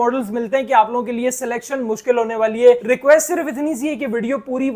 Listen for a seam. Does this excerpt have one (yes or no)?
no